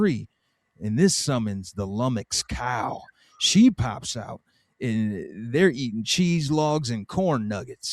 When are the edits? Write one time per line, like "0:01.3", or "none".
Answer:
none